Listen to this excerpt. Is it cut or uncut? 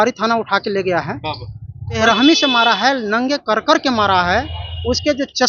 cut